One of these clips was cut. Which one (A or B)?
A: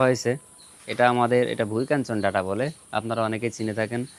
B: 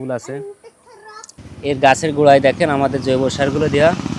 B